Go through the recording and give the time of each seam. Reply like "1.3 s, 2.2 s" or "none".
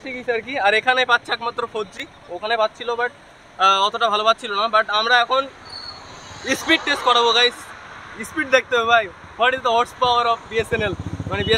none